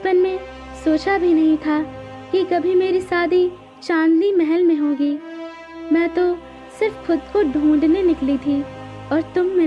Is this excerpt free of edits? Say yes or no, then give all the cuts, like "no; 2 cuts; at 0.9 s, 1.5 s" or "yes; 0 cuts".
yes; 0 cuts